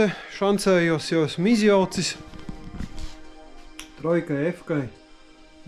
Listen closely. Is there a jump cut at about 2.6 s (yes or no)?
no